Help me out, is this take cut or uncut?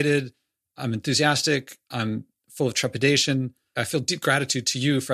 cut